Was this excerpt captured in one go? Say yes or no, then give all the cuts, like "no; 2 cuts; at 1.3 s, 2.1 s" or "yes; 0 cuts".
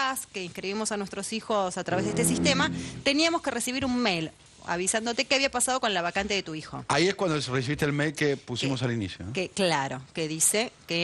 no; 1 cut; at 4.4 s